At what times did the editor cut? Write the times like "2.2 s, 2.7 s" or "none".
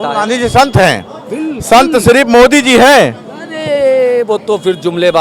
none